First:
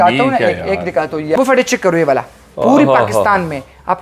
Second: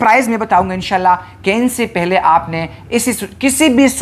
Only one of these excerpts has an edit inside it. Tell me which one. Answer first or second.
first